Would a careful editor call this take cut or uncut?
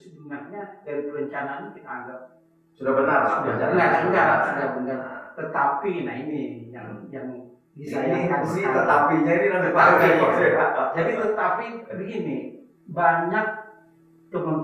uncut